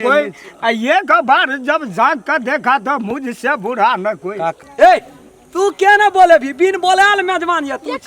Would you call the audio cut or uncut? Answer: cut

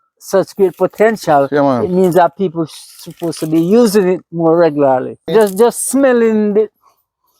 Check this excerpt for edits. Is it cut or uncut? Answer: cut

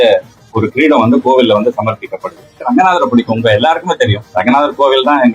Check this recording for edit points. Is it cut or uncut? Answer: cut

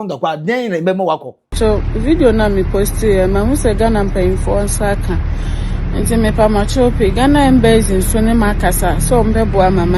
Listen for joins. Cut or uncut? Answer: cut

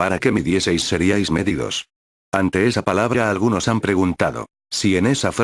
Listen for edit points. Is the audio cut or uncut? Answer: cut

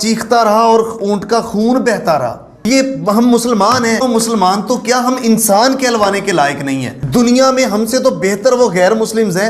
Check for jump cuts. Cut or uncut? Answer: cut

